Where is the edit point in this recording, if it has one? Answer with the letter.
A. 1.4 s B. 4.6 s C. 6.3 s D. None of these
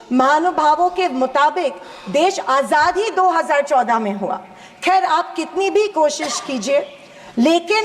D